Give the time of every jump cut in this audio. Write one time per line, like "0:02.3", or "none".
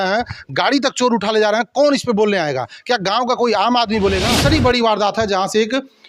0:04.3